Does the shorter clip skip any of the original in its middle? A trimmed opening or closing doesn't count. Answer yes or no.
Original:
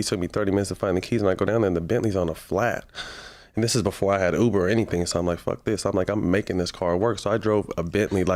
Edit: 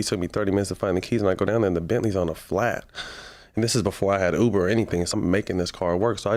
yes